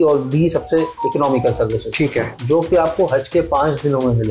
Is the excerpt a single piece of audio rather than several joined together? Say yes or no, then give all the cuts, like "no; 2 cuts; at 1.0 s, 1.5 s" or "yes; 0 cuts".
no; 1 cut; at 2.3 s